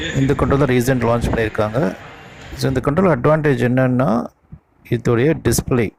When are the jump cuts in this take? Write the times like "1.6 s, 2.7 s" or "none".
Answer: none